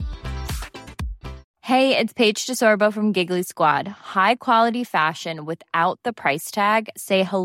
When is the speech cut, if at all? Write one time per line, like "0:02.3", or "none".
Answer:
0:01.5